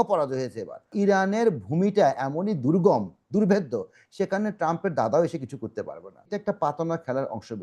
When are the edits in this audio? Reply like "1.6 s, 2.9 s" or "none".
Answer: 0.9 s, 6.3 s